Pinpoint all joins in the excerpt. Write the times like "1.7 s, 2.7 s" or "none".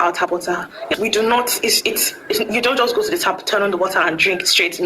0.9 s